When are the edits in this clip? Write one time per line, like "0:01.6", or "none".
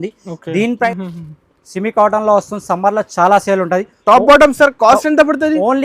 0:00.9